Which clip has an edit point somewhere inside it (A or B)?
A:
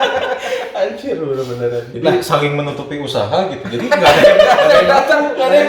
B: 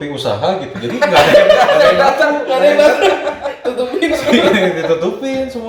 A